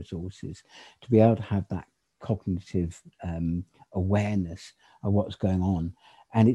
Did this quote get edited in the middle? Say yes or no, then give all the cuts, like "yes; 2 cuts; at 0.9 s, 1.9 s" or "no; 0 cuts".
no; 0 cuts